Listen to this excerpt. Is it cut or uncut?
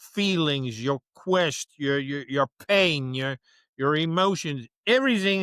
uncut